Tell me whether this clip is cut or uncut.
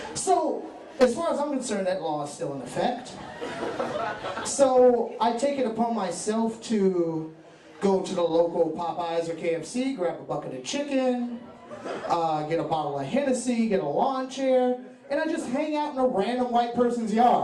uncut